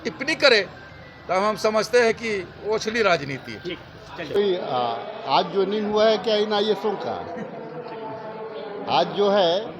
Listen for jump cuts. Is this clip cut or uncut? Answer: cut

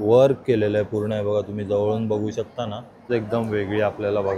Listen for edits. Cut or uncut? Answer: cut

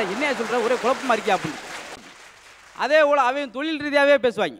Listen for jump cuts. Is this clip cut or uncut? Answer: cut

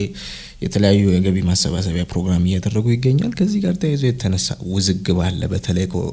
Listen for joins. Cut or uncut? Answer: uncut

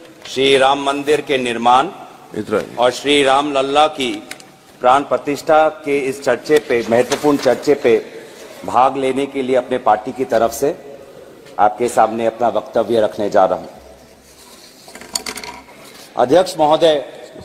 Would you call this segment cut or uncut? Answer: cut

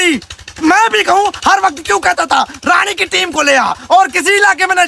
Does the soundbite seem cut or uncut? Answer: uncut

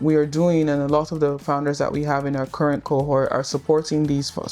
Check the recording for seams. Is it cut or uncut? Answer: uncut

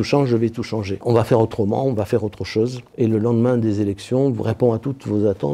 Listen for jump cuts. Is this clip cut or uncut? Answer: uncut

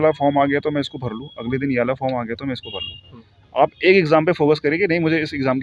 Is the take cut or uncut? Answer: uncut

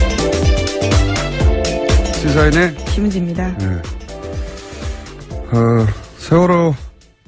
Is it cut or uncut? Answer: cut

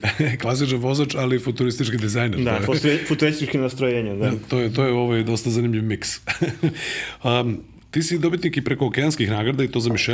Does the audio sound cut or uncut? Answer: uncut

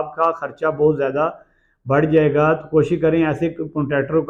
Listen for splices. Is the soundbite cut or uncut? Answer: uncut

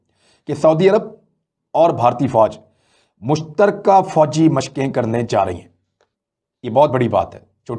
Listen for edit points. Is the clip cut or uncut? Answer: uncut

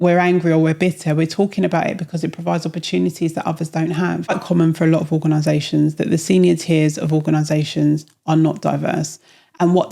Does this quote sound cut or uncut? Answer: cut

